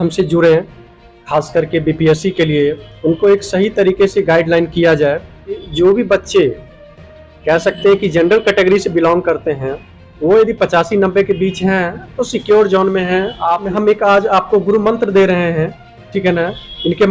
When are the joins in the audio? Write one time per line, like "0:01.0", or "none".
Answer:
0:05.6
0:13.7